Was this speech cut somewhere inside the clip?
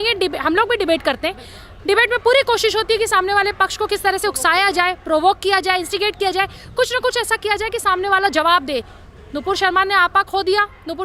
no; 0 cuts

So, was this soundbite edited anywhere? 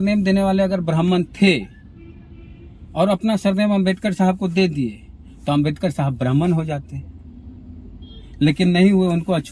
no; 0 cuts

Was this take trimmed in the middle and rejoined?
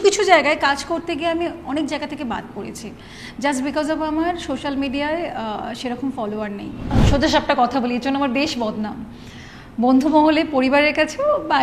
yes; 1 cut; at 7.0 s

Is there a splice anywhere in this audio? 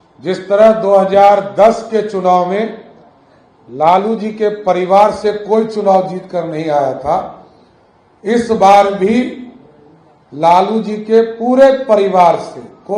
no; 0 cuts

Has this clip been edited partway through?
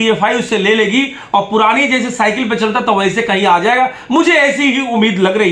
no; 0 cuts

